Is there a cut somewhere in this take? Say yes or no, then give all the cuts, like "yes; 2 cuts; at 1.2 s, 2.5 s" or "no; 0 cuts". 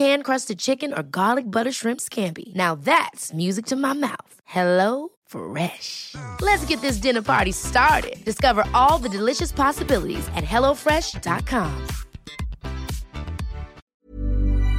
yes; 1 cut; at 13.8 s